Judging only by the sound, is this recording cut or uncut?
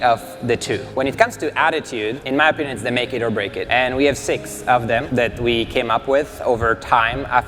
cut